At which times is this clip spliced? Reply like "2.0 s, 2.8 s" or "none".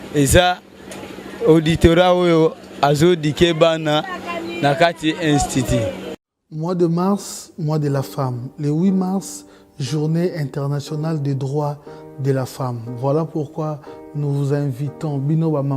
6.2 s